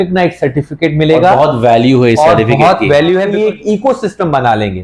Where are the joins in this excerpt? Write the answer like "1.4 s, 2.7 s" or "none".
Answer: 3.3 s